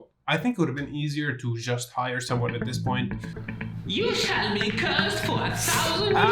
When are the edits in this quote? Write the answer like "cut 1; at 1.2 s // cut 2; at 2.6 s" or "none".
cut 1; at 3.0 s